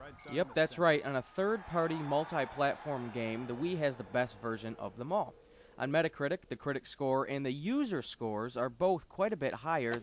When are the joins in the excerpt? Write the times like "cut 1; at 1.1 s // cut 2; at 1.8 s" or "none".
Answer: cut 1; at 3.6 s